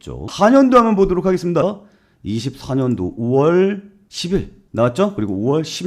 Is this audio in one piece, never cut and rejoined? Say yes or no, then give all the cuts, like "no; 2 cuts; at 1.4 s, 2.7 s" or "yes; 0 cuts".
no; 1 cut; at 1.6 s